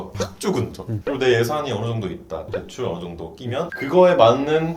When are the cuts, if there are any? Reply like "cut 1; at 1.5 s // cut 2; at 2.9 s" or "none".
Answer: cut 1; at 0.9 s // cut 2; at 3.7 s